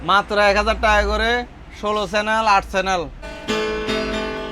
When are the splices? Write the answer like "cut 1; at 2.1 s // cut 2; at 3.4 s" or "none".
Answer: cut 1; at 3.2 s